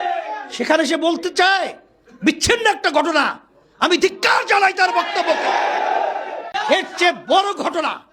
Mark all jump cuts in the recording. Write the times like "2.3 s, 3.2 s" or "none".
6.5 s